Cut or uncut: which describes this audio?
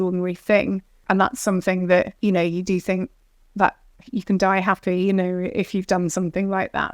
cut